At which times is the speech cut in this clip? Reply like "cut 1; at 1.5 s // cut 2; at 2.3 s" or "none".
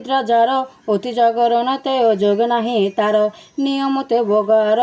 none